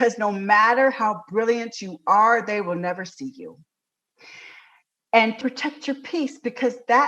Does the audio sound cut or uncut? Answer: cut